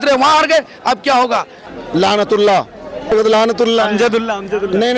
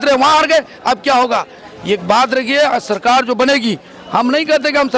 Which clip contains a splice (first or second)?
first